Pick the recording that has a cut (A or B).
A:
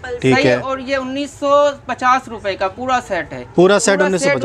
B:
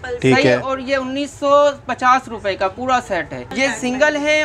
B